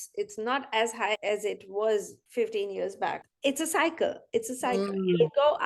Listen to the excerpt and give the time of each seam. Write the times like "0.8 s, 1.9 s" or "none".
1.2 s, 2.2 s, 3.2 s